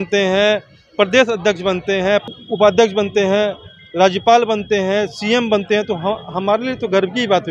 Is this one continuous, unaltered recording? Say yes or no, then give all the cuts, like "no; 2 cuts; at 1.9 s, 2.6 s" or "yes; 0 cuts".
yes; 0 cuts